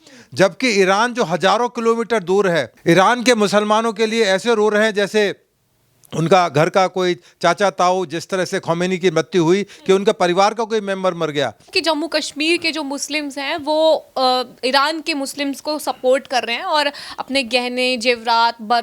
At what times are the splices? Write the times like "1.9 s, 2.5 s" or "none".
2.7 s, 11.7 s